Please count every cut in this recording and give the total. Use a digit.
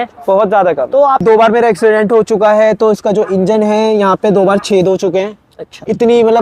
1